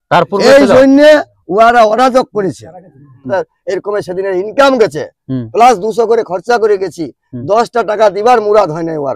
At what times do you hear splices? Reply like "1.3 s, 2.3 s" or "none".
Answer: 3.2 s